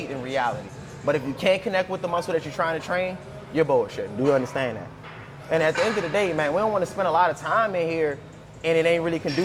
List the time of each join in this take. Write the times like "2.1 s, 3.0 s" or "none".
none